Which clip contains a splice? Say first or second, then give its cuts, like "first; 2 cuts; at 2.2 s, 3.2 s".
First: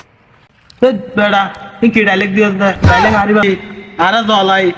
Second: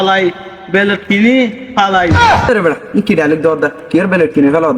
first; 1 cut; at 3.4 s